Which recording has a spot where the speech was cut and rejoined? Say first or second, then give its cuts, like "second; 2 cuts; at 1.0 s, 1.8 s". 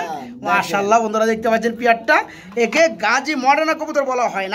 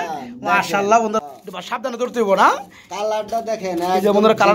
second; 1 cut; at 1.2 s